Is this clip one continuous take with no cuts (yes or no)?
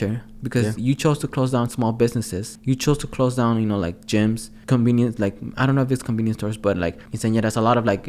no